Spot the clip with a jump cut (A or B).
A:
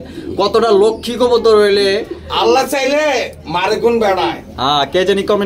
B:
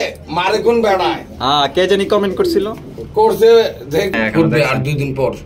B